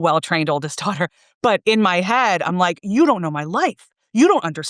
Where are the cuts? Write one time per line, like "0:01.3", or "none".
none